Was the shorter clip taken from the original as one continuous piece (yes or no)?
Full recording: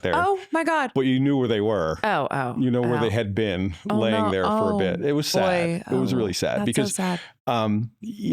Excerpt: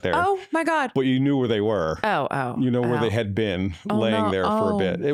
yes